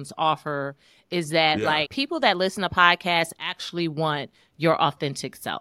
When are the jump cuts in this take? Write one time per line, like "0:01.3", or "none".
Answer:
0:01.9